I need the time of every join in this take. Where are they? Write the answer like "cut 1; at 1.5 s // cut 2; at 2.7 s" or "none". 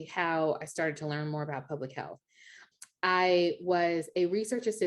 cut 1; at 2.6 s